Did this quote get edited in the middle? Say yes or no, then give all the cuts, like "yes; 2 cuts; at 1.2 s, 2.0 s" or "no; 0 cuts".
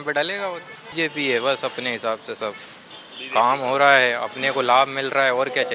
yes; 1 cut; at 1.0 s